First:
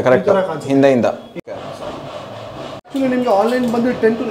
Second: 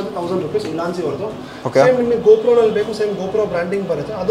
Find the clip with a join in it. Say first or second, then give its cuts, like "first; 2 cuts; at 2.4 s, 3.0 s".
first; 2 cuts; at 1.5 s, 2.9 s